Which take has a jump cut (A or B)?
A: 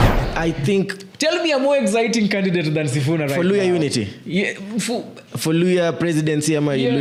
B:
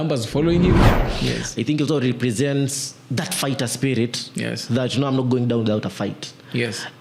B